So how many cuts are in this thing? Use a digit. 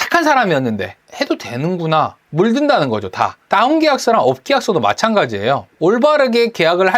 3